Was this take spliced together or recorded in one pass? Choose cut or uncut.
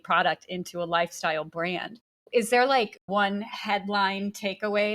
cut